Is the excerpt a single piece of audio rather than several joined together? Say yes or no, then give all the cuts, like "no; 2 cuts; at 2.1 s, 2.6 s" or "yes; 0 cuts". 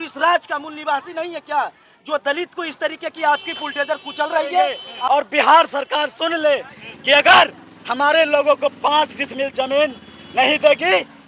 no; 1 cut; at 4.9 s